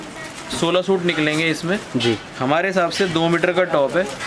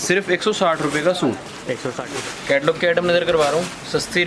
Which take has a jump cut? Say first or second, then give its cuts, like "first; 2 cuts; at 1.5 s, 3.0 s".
second; 1 cut; at 2.0 s